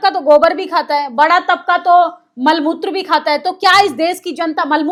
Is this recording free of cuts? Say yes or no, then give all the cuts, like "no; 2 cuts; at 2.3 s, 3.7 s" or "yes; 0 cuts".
yes; 0 cuts